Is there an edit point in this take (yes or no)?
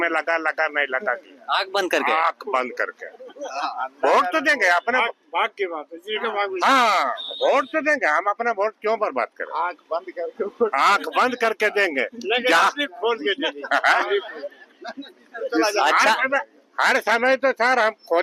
no